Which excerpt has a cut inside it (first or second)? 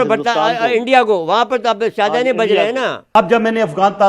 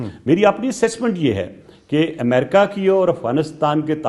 first